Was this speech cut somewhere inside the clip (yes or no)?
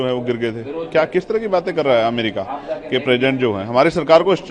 no